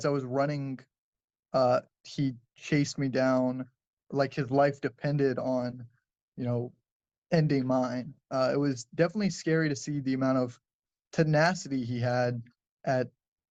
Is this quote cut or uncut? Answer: uncut